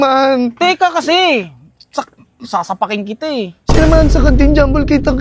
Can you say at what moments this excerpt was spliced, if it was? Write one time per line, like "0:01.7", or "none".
none